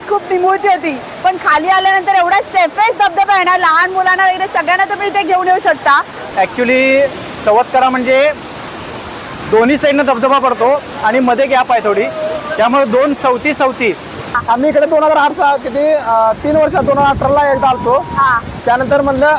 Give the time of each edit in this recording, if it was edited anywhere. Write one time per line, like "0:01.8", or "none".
0:06.2
0:14.3